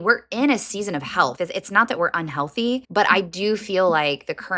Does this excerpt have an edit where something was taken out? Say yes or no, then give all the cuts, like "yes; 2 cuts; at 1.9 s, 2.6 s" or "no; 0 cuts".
yes; 2 cuts; at 1.3 s, 2.9 s